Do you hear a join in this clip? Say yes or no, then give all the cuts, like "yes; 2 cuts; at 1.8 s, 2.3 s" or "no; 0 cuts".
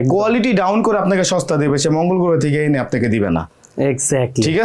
no; 0 cuts